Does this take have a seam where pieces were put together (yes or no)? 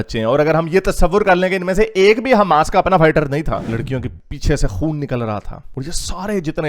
yes